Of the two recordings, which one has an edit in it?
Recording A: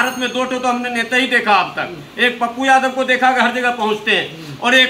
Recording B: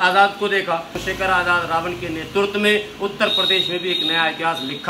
B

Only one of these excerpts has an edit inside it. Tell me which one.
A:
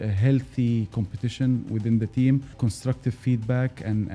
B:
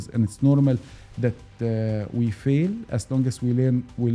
A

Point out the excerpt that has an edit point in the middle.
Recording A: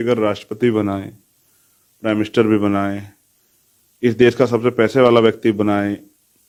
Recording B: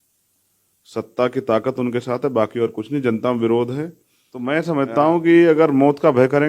B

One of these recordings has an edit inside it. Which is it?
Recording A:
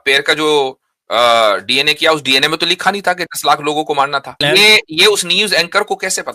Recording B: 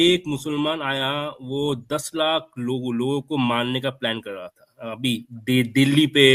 A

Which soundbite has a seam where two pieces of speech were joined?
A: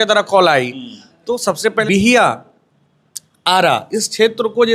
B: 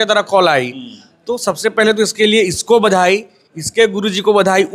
A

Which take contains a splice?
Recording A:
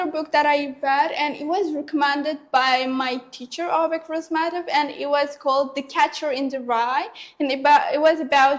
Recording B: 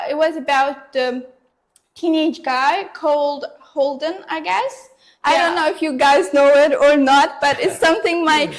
B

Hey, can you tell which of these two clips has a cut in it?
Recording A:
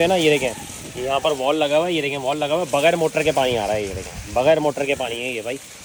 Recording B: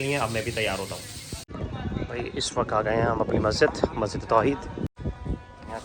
B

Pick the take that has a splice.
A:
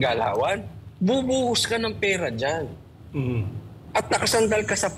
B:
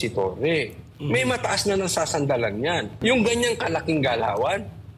B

